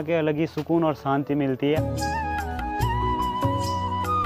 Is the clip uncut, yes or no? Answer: no